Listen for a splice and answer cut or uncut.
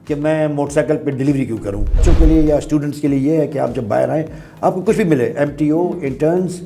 cut